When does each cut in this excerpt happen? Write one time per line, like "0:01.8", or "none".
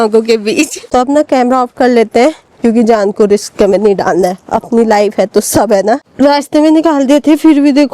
0:00.9
0:06.0